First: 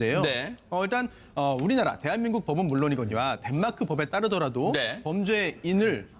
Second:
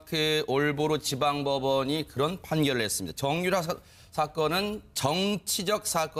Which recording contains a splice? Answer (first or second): first